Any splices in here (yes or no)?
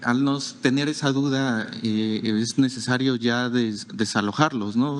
no